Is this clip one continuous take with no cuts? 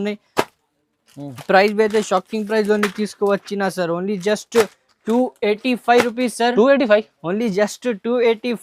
yes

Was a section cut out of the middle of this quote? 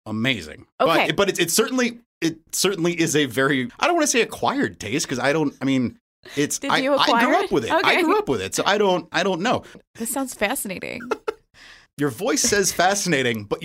yes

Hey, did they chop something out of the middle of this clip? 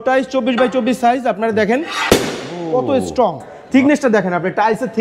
yes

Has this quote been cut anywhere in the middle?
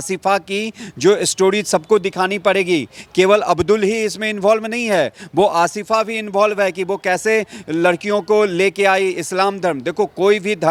no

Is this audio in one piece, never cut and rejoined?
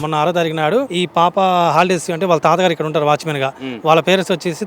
no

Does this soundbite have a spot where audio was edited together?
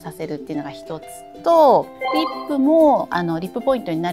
yes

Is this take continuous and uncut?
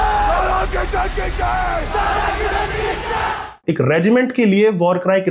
no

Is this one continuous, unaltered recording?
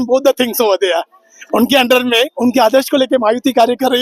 yes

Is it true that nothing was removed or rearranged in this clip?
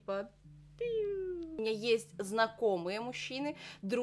no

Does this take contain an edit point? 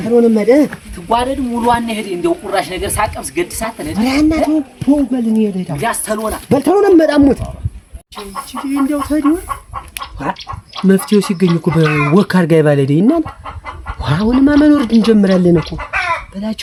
no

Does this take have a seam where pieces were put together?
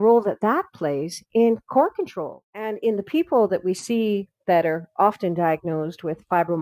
yes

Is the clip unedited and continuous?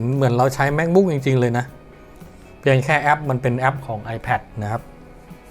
yes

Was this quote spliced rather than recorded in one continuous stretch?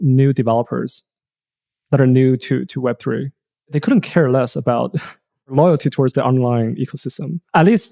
no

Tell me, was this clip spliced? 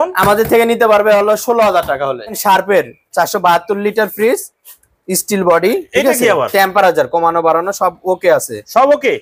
yes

